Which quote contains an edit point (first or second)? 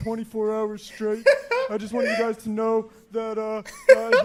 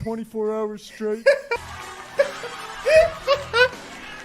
second